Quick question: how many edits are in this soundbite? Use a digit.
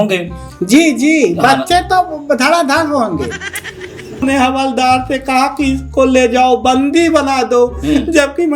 1